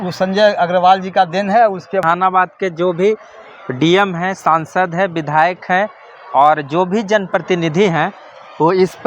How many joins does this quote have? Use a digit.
1